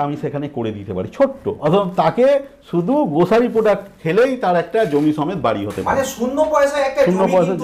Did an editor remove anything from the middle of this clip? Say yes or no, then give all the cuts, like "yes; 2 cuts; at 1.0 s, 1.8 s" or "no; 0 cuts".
yes; 1 cut; at 1.5 s